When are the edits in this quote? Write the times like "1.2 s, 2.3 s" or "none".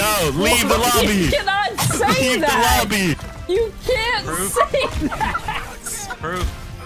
none